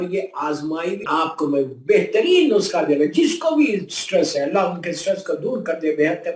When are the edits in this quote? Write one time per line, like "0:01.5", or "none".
0:01.1